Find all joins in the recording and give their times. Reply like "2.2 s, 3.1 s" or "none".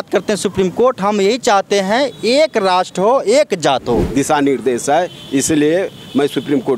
4.1 s